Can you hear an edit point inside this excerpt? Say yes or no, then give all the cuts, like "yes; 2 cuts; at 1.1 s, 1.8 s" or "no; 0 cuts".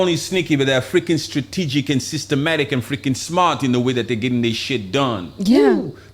no; 0 cuts